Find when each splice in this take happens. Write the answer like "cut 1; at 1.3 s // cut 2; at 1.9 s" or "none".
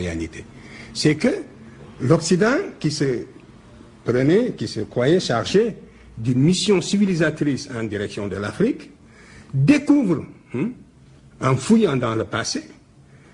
none